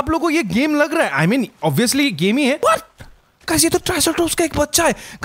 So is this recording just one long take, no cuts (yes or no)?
no